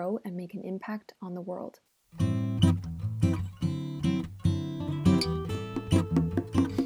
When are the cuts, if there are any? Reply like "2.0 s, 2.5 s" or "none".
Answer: 2.0 s